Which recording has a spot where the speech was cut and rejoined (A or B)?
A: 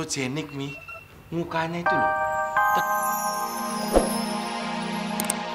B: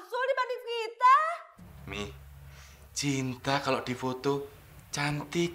A